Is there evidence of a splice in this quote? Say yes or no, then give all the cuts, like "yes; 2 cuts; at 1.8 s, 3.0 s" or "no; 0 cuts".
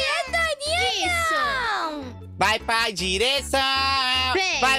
yes; 1 cut; at 2.2 s